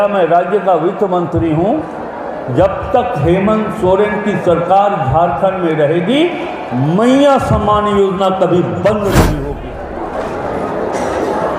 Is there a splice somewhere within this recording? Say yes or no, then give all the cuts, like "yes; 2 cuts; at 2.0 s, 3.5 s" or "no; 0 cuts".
yes; 1 cut; at 9.5 s